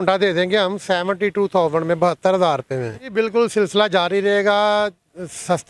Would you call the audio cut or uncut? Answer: cut